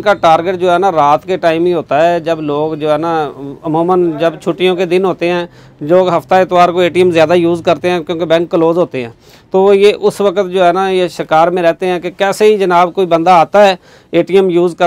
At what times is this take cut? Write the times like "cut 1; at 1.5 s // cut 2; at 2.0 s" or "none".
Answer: none